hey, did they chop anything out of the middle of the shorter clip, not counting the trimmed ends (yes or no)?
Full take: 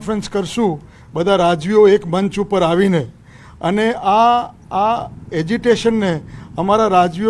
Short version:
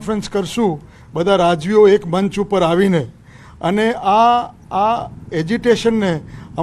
no